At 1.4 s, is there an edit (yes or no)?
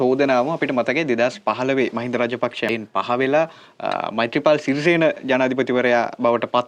no